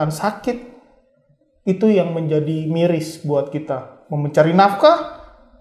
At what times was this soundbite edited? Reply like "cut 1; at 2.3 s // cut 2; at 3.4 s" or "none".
none